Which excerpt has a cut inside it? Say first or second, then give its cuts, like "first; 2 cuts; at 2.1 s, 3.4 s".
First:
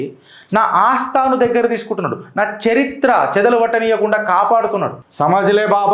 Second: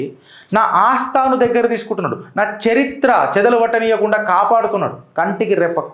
first; 1 cut; at 5.0 s